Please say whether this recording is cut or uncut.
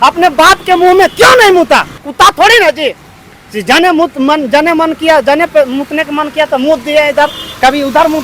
cut